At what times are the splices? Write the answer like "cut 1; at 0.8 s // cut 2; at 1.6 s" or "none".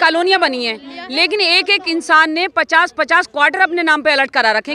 none